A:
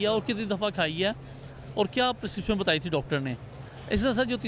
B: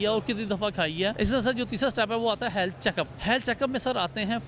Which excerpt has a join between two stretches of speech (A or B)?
B